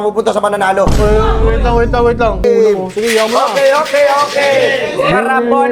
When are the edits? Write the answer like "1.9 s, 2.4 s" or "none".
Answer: 2.4 s